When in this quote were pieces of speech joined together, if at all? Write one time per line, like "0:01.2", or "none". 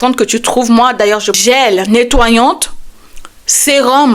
0:01.4